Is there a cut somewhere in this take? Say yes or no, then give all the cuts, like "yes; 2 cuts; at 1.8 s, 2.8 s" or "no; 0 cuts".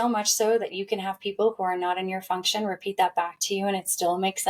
no; 0 cuts